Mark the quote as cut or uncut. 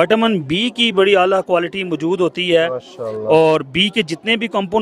uncut